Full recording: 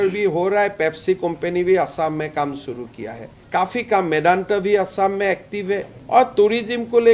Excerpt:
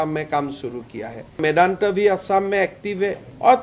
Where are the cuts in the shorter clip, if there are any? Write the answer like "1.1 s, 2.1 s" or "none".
1.4 s